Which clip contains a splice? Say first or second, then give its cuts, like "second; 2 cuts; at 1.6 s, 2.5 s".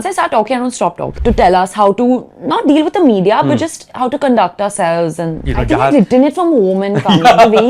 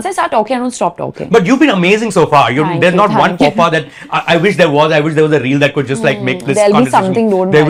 first; 2 cuts; at 1.1 s, 5.4 s